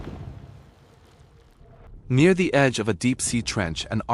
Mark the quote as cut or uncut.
cut